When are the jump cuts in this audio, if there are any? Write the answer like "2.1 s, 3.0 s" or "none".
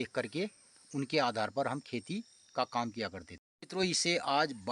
none